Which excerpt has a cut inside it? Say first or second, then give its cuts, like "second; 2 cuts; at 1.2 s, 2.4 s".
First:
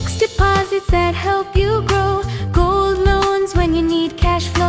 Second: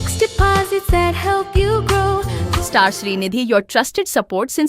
second; 1 cut; at 2.4 s